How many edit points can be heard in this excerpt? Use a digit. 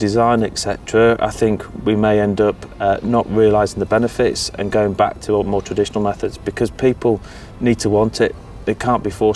0